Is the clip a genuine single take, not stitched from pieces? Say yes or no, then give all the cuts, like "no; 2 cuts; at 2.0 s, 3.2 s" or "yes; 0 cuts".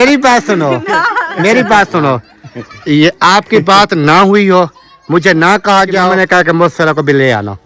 no; 1 cut; at 6.1 s